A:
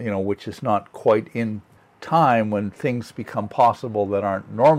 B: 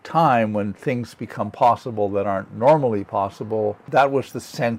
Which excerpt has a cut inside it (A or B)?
B